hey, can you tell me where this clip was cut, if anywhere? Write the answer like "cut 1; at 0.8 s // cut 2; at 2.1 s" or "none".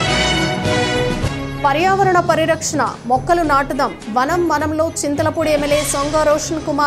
cut 1; at 1.0 s

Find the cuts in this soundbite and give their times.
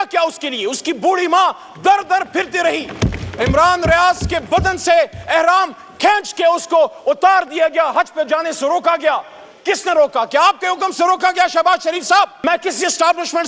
cut 1; at 12.4 s

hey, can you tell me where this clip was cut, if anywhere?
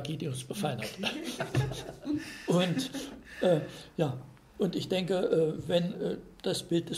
none

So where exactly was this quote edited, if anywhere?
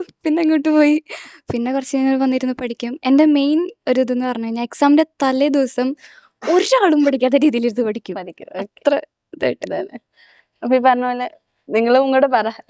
none

